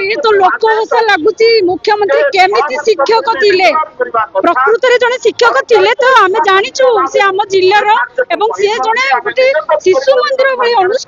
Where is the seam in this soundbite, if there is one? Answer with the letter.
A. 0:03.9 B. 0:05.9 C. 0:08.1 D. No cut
D